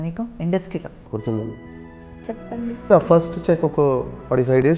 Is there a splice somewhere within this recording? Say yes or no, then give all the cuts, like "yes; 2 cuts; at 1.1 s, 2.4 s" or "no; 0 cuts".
yes; 2 cuts; at 1.0 s, 2.9 s